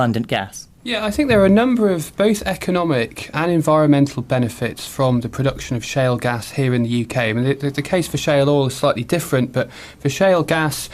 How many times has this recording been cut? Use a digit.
1